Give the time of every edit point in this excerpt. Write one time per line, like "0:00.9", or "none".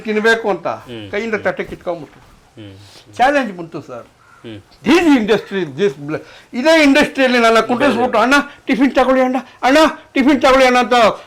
none